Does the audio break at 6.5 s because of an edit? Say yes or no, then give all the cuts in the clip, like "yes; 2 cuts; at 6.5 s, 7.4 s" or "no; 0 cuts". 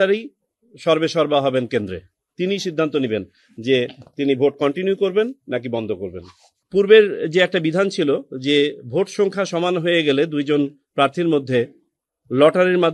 yes; 1 cut; at 6.5 s